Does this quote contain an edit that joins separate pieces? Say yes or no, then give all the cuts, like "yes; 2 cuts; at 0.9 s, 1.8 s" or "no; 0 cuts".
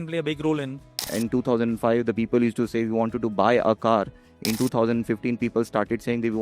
yes; 2 cuts; at 1.1 s, 4.6 s